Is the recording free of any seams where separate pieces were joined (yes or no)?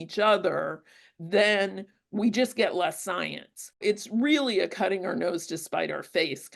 no